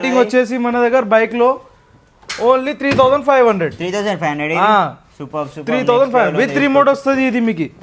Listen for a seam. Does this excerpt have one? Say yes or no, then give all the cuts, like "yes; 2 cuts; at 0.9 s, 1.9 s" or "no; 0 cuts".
no; 0 cuts